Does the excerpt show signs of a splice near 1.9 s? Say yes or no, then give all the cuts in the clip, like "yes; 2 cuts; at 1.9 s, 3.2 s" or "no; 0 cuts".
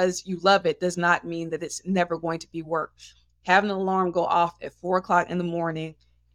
no; 0 cuts